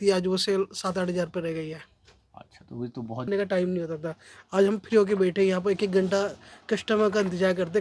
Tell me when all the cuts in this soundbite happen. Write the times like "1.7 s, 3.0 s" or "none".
3.3 s